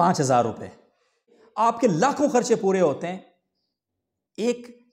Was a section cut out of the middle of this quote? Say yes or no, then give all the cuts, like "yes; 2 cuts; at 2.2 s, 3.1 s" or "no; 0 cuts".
yes; 1 cut; at 1.4 s